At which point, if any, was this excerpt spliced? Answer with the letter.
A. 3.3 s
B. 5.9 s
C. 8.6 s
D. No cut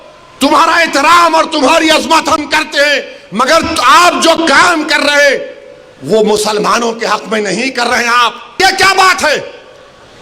C